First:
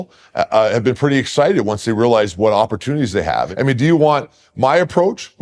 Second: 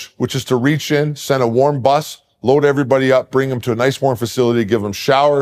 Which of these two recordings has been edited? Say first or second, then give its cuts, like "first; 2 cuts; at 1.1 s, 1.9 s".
first; 1 cut; at 3.5 s